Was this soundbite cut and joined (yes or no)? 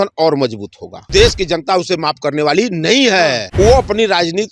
yes